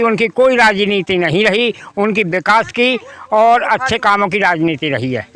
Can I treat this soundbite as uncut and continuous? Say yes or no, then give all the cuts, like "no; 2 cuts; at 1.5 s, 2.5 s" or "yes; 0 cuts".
yes; 0 cuts